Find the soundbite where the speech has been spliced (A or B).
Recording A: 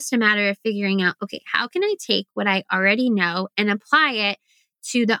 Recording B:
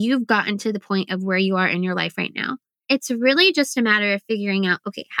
B